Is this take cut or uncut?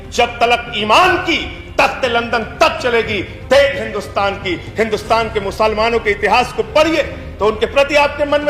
uncut